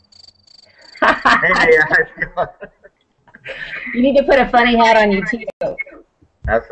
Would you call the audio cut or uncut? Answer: uncut